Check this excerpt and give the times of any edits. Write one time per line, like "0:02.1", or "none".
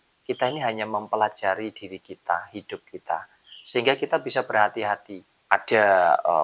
0:05.5